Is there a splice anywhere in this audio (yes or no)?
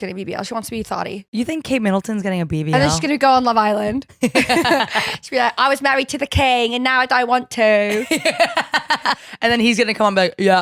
yes